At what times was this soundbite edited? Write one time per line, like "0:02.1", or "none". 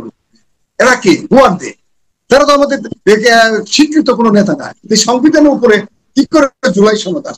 0:04.7
0:06.6